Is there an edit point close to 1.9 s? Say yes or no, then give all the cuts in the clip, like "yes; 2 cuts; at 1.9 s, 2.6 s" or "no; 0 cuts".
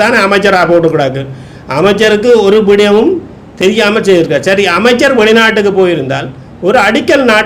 no; 0 cuts